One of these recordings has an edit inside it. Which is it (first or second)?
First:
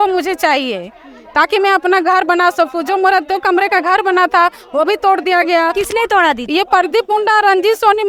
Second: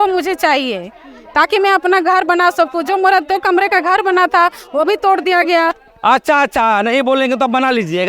second